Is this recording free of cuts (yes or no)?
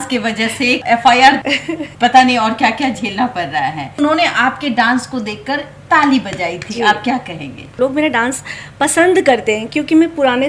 no